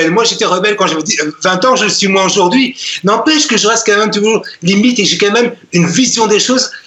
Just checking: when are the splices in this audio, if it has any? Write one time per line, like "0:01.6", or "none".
none